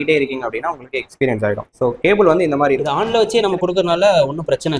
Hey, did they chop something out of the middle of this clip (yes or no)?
yes